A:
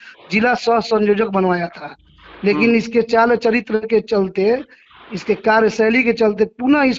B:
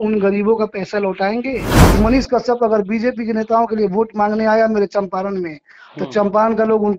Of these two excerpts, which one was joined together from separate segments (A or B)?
B